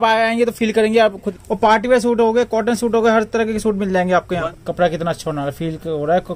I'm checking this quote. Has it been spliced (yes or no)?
yes